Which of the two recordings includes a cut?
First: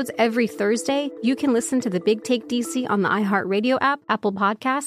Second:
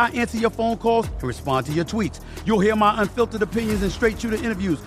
first; 2 cuts; at 1.1 s, 4.0 s

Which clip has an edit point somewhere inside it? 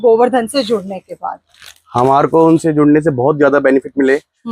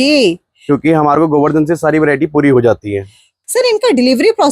second; 1 cut; at 3.4 s

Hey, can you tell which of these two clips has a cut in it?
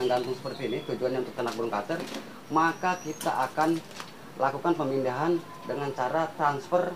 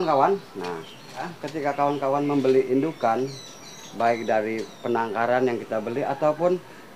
second; 1 cut; at 1.4 s

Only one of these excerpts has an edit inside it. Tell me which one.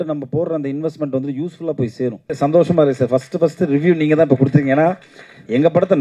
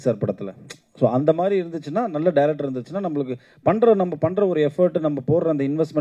first; 1 cut; at 2.3 s

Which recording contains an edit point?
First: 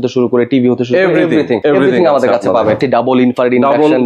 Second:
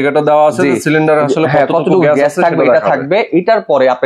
first; 2 cuts; at 1.6 s, 2.8 s

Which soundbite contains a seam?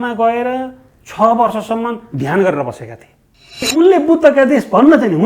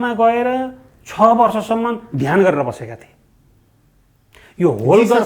first; 1 cut; at 3.7 s

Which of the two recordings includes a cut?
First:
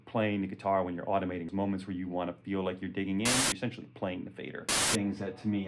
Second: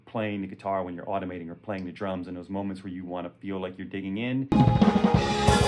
first; 3 cuts; at 1.5 s, 3.4 s, 4.7 s

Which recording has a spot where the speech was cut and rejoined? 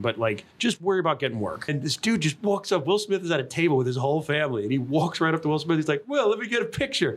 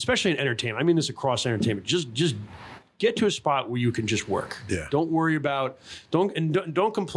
first; 1 cut; at 1.7 s

